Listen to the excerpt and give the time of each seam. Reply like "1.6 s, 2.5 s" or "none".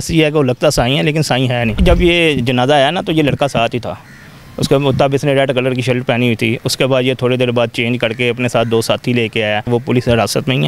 1.8 s, 9.6 s